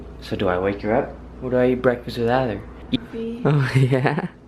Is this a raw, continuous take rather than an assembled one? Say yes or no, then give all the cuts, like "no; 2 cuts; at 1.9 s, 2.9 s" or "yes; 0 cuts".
yes; 0 cuts